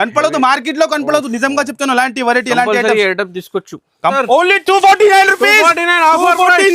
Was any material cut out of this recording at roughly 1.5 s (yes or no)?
no